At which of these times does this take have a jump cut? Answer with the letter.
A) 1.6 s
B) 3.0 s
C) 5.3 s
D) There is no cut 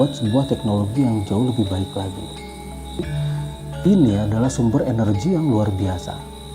B